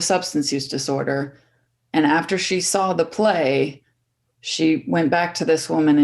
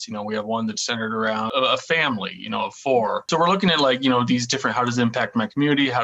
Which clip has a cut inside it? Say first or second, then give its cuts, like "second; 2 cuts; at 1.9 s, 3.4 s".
second; 2 cuts; at 1.5 s, 3.3 s